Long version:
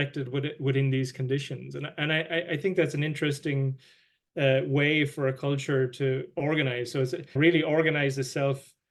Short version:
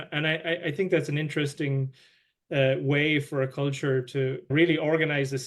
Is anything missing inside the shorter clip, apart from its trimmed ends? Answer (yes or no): yes